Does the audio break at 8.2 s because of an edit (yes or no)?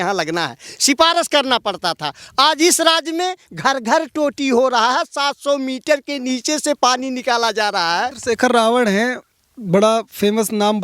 yes